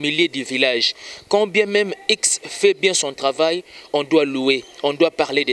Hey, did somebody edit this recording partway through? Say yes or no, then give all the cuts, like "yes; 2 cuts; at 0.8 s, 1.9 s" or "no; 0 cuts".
no; 0 cuts